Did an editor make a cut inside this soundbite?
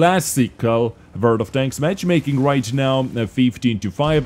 no; 0 cuts

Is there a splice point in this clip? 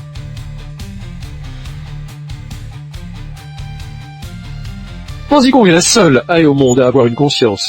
yes; 1 cut; at 5.3 s

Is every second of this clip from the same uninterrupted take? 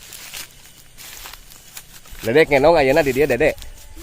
yes; 0 cuts

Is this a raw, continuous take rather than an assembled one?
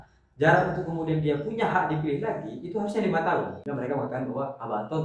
no; 1 cut; at 3.6 s

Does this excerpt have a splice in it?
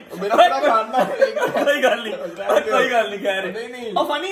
no; 0 cuts

